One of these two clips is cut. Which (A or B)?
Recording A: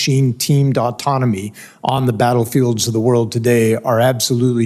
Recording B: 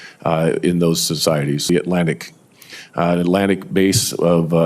B